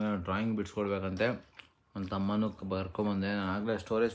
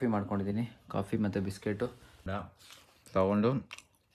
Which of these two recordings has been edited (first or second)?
second